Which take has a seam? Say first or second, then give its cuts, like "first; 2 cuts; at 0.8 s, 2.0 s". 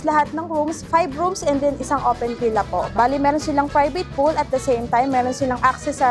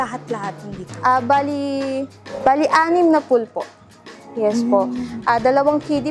first; 1 cut; at 2.9 s